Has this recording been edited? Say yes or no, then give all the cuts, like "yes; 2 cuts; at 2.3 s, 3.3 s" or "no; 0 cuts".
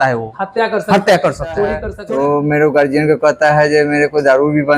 yes; 1 cut; at 1.9 s